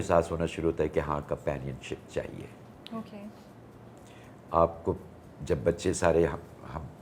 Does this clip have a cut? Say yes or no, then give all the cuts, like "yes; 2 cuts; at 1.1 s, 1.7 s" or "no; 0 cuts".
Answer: no; 0 cuts